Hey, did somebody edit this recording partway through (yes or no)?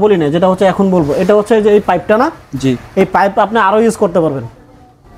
no